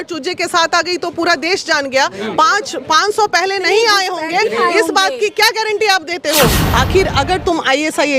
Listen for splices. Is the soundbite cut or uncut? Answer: cut